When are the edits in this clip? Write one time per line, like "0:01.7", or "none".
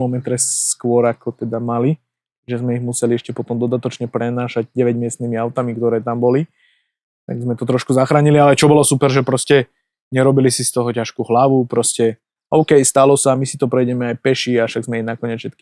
none